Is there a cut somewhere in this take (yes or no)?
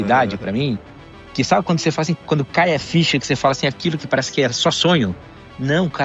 no